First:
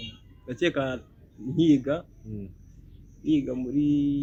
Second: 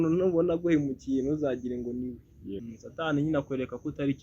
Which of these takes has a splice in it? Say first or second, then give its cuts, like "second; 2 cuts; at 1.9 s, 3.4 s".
second; 1 cut; at 2.7 s